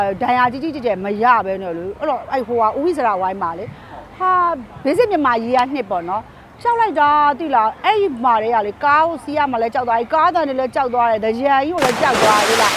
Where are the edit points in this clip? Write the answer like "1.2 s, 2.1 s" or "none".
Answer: none